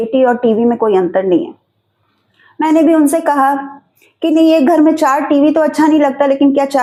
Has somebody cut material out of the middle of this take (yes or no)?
no